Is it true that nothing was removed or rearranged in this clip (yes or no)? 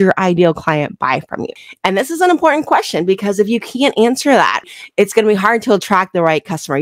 no